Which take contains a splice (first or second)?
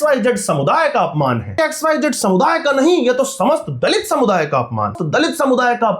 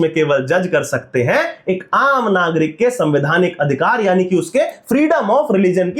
first